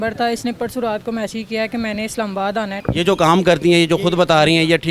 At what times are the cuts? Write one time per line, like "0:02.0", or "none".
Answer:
0:02.8